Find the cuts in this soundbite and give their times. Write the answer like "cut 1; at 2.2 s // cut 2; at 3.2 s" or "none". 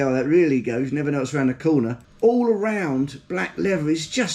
cut 1; at 2.0 s